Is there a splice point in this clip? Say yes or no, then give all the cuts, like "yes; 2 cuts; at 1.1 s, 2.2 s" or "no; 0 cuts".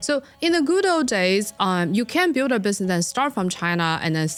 no; 0 cuts